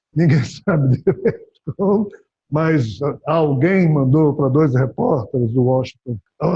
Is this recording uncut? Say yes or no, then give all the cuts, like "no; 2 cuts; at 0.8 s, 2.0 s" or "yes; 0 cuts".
yes; 0 cuts